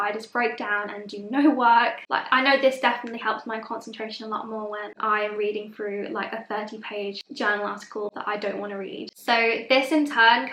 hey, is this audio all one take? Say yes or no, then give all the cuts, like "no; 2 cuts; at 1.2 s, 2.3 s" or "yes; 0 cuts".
no; 3 cuts; at 2.0 s, 7.2 s, 9.2 s